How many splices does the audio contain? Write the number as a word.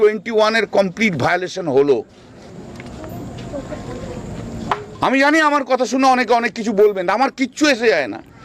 zero